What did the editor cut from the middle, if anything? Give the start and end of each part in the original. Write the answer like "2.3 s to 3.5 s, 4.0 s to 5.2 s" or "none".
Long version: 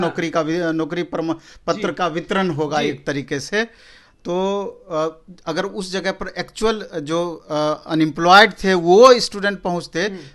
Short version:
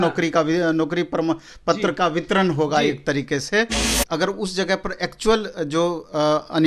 3.9 s to 5.3 s